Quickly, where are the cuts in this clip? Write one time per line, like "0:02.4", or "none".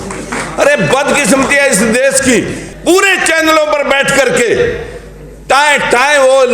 0:02.7

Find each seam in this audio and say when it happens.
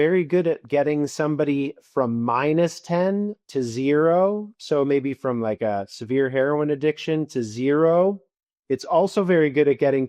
none

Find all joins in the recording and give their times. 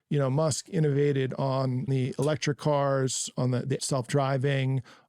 0:01.9
0:03.8

